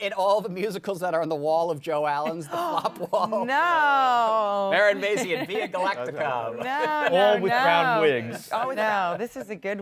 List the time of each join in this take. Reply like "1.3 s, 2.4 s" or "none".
8.7 s